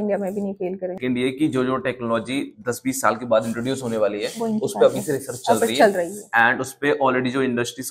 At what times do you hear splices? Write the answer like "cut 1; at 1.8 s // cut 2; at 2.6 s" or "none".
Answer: cut 1; at 1.0 s